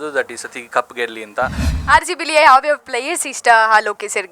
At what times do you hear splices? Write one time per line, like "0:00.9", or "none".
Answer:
0:01.7